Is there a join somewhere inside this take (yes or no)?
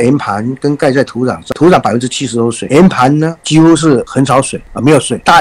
yes